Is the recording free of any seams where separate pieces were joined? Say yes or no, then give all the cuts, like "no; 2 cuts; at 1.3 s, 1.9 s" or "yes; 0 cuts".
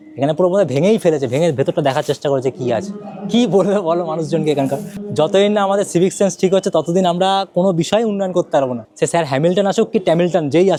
yes; 0 cuts